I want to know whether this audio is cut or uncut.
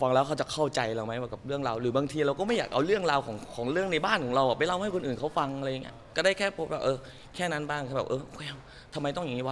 cut